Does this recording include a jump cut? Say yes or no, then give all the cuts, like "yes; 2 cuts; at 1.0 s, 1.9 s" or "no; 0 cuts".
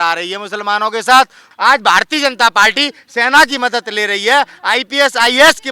yes; 1 cut; at 1.5 s